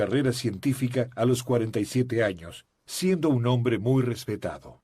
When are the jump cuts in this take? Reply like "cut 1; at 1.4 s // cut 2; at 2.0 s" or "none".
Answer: cut 1; at 3.6 s